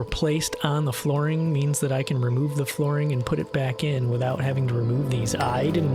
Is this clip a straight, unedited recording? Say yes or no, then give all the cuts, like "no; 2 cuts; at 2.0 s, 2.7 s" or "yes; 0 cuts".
yes; 0 cuts